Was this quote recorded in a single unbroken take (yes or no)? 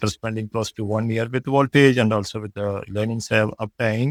yes